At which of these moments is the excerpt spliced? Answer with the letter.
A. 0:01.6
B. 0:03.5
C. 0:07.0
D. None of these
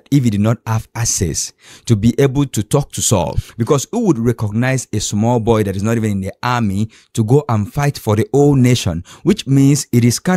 B